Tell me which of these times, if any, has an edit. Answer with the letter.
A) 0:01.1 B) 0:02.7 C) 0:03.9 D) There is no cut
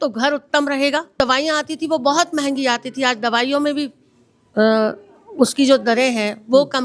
A